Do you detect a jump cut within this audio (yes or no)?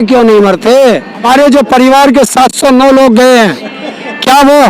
yes